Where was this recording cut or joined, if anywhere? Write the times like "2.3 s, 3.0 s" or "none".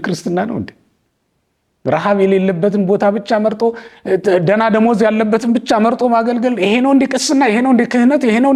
none